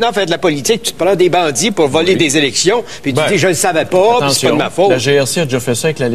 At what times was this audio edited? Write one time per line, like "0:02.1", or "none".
0:03.9

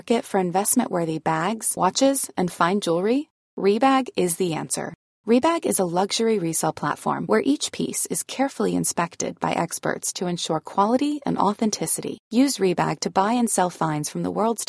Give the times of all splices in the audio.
none

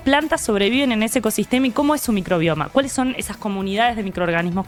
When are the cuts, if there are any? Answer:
none

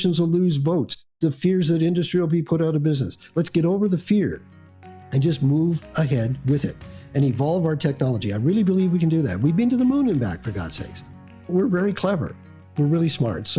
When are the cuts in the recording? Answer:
none

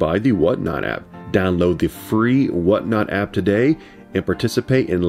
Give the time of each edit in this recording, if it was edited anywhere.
none

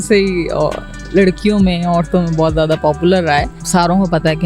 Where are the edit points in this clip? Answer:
0:03.6

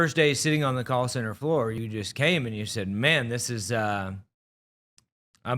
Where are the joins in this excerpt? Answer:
0:01.8

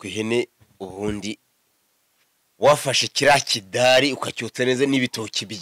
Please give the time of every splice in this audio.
none

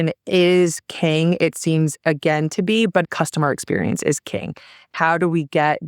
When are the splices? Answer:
0:03.0
0:04.9

